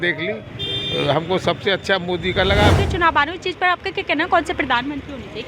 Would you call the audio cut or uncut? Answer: cut